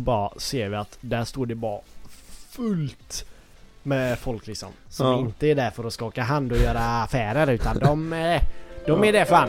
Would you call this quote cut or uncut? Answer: uncut